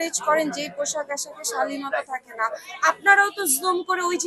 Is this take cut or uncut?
uncut